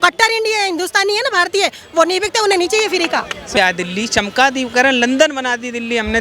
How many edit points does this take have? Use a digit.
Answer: 1